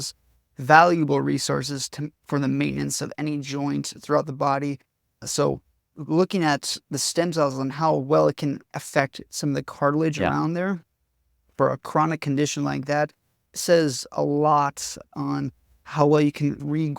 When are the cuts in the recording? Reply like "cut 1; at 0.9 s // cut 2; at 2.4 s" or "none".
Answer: cut 1; at 8.7 s // cut 2; at 15.1 s